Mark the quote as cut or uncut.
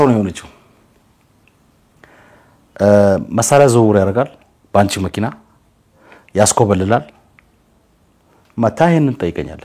uncut